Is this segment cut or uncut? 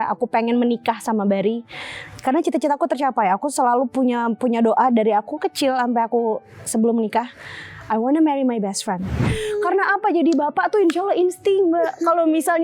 cut